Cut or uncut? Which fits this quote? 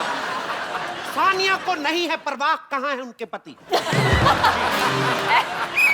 cut